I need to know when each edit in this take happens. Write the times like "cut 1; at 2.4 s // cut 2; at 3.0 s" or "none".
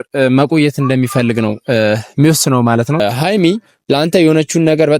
cut 1; at 3.0 s